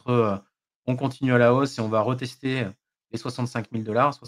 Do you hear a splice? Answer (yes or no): no